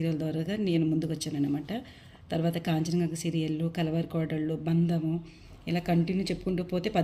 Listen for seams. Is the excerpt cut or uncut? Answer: uncut